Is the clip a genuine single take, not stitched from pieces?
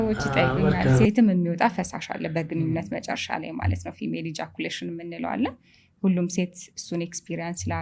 no; 1 cut; at 1.1 s

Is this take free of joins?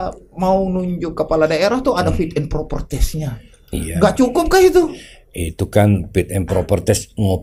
yes; 0 cuts

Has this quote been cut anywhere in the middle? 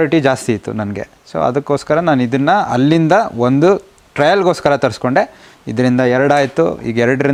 no; 0 cuts

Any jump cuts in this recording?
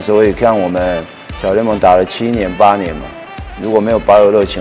no; 0 cuts

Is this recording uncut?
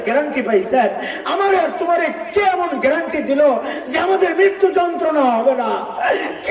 yes; 0 cuts

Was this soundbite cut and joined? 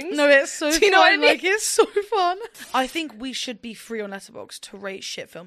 yes; 1 cut; at 2.6 s

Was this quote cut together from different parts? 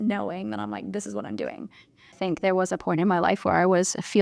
yes; 1 cut; at 2.2 s

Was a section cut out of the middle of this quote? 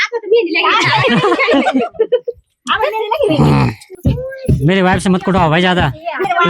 yes; 1 cut; at 3.9 s

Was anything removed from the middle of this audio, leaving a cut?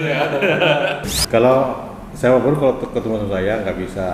yes; 1 cut; at 1.1 s

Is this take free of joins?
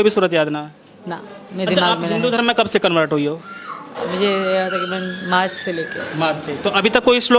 yes; 0 cuts

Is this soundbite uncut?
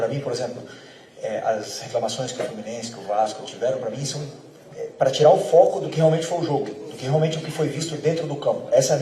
yes; 0 cuts

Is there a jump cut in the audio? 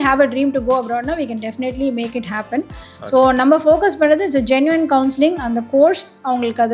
no; 0 cuts

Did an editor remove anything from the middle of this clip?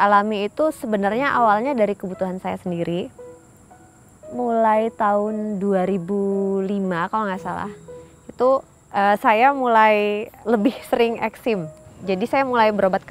yes; 2 cuts; at 3.7 s, 10.3 s

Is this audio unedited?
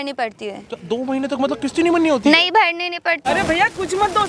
no; 1 cut; at 3.2 s

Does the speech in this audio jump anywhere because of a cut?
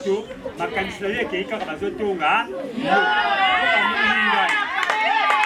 no; 0 cuts

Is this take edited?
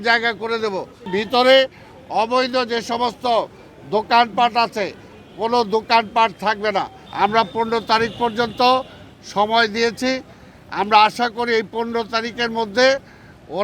yes; 2 cuts; at 1.1 s, 7.0 s

